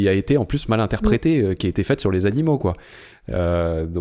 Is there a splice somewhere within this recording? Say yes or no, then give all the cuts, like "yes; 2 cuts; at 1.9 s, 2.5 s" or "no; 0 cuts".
no; 0 cuts